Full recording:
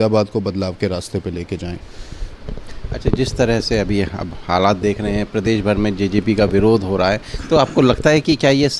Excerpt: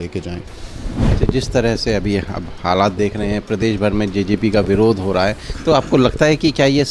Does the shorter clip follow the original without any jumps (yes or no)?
no